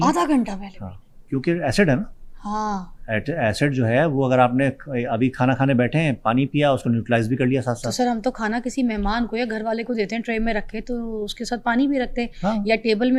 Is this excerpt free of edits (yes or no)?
yes